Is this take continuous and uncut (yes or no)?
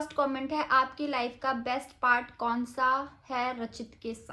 yes